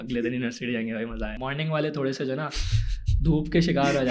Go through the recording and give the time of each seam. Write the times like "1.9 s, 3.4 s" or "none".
1.3 s